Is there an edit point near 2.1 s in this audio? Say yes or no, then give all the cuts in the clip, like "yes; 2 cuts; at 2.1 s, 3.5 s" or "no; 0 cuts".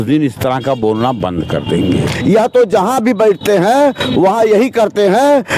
yes; 1 cut; at 2.1 s